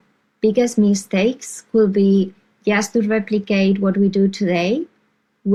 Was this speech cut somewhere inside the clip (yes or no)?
no